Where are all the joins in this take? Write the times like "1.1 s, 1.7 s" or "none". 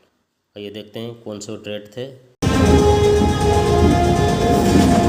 2.4 s